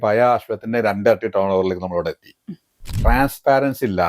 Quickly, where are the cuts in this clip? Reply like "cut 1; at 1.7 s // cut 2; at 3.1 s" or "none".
cut 1; at 2.9 s